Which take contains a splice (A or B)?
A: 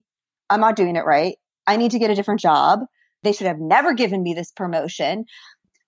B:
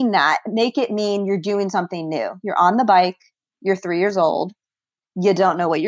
A